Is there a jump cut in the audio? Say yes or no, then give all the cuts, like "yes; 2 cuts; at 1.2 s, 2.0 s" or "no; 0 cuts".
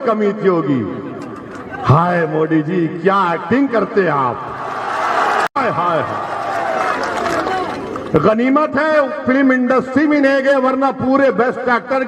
no; 0 cuts